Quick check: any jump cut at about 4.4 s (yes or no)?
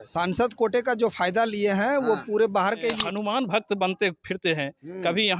no